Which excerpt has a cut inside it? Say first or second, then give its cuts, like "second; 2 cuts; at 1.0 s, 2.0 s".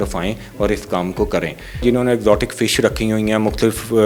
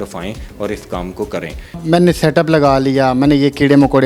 first; 1 cut; at 1.8 s